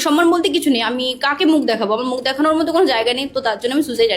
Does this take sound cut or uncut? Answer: uncut